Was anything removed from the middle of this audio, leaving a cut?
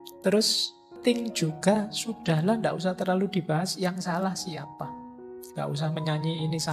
yes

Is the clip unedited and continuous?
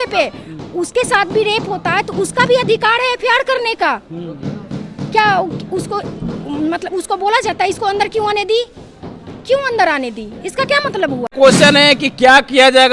no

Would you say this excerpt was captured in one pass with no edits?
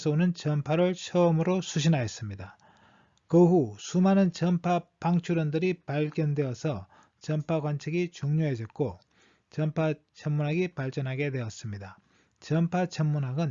no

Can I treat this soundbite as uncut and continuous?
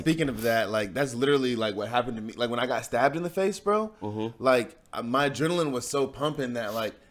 yes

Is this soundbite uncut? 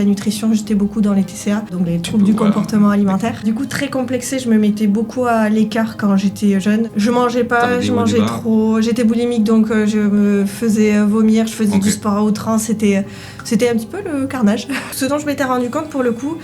no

